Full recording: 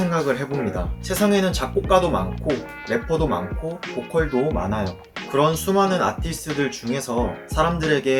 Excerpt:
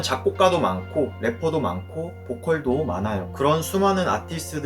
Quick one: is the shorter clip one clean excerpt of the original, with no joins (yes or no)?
no